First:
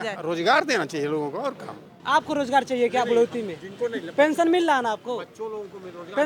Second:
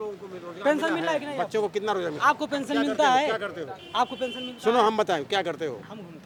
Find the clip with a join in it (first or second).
first